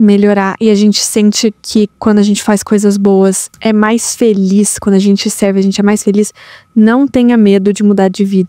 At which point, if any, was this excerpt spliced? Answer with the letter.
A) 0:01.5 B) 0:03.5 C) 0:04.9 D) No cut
B